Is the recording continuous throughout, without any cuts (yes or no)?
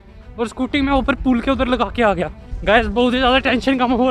no